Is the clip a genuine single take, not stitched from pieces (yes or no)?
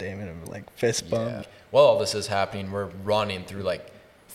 no